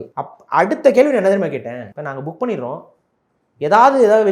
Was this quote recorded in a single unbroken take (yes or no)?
yes